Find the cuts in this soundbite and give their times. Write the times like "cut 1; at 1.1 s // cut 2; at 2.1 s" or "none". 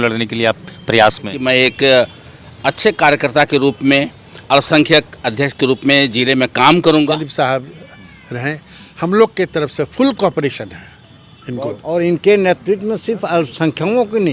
cut 1; at 1.3 s // cut 2; at 7.3 s // cut 3; at 11.8 s